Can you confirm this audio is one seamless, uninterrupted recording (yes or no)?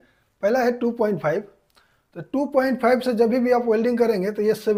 yes